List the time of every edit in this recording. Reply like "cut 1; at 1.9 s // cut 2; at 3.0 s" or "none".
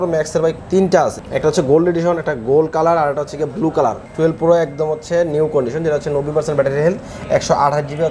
cut 1; at 1.2 s // cut 2; at 4.0 s